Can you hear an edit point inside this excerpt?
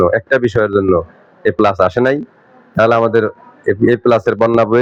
no; 0 cuts

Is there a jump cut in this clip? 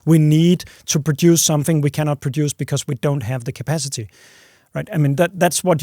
no; 0 cuts

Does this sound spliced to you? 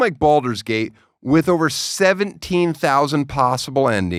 no; 0 cuts

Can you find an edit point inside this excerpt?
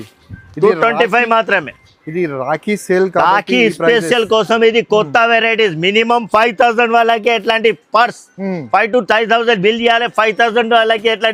no; 0 cuts

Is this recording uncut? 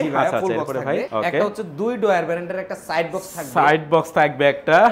no; 1 cut; at 1.1 s

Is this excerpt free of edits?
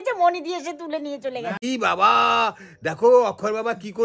no; 1 cut; at 1.6 s

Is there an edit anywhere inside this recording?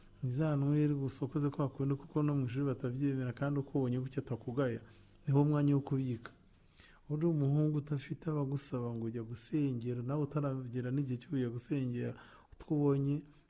no; 0 cuts

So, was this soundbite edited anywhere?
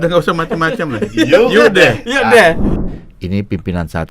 yes; 1 cut; at 2.7 s

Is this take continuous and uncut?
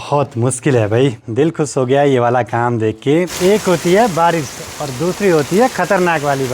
no; 2 cuts; at 1.2 s, 3.3 s

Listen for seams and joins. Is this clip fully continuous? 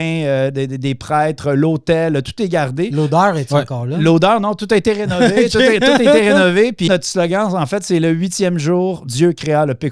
no; 1 cut; at 6.9 s

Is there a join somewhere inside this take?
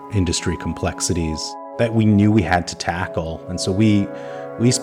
yes; 1 cut; at 1.5 s

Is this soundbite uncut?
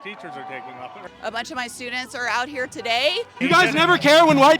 no; 2 cuts; at 0.9 s, 3.3 s

